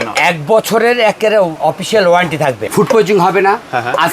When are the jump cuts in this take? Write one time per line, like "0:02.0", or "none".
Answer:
0:01.5
0:02.6

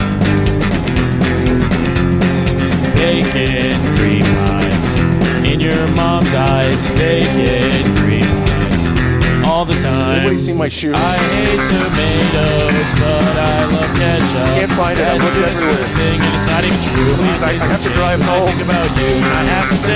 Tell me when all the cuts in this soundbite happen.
none

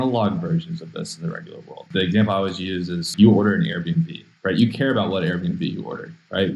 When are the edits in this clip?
0:01.9
0:03.1

